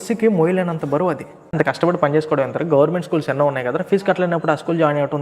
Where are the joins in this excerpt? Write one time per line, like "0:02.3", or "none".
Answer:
0:01.5